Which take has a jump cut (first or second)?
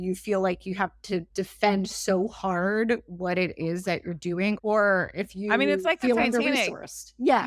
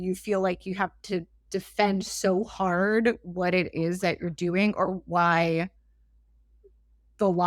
first